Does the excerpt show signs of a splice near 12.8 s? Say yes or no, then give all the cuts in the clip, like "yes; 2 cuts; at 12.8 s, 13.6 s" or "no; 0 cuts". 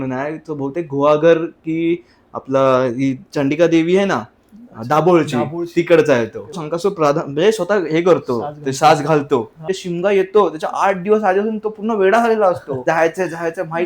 yes; 3 cuts; at 6.7 s, 9.7 s, 12.8 s